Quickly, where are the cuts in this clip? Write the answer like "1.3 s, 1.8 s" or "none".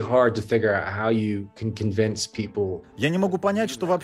2.8 s